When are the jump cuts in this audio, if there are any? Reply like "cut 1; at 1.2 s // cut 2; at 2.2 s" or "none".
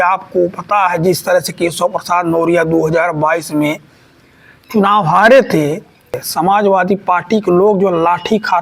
cut 1; at 6.2 s